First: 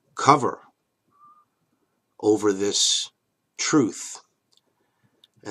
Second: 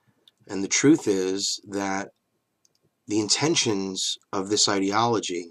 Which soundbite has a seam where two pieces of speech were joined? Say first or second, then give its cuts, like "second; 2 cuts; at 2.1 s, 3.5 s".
second; 1 cut; at 2.9 s